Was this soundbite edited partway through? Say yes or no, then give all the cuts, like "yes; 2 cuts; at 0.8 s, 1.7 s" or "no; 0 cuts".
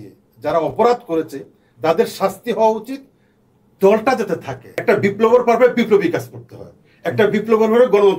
yes; 1 cut; at 4.7 s